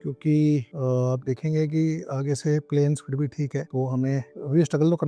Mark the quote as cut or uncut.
uncut